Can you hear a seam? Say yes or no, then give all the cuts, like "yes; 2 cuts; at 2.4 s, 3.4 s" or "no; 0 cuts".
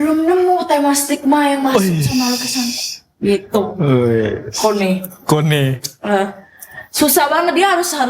no; 0 cuts